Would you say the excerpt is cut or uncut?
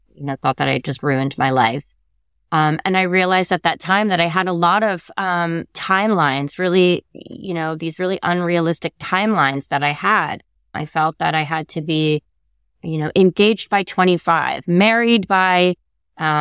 cut